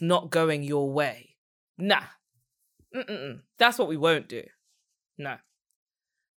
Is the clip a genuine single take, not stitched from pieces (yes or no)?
no